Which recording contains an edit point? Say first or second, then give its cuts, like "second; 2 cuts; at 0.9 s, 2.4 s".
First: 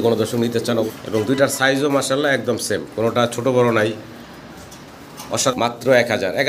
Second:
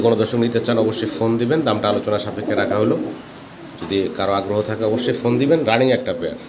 first; 2 cuts; at 1.0 s, 5.5 s